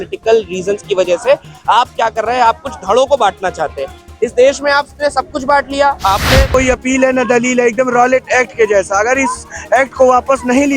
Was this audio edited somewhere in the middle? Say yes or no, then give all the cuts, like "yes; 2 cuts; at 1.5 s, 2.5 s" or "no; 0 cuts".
yes; 1 cut; at 6.5 s